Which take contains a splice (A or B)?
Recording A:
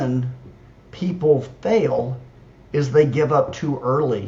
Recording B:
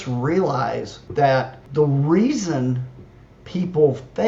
B